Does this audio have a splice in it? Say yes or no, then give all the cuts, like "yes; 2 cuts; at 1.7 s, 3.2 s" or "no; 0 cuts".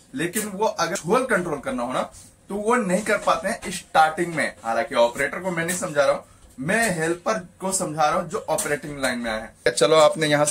yes; 2 cuts; at 1.0 s, 9.7 s